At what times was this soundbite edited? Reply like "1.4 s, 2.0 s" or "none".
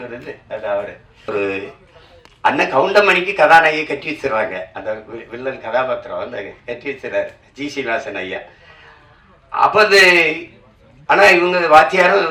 1.3 s